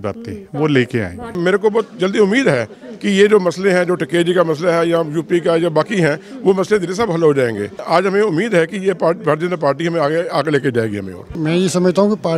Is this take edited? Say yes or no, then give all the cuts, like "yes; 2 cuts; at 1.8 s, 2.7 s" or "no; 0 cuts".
yes; 3 cuts; at 1.4 s, 7.8 s, 11.3 s